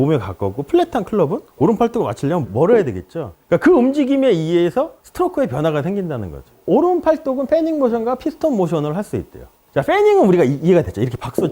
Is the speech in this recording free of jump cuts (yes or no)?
yes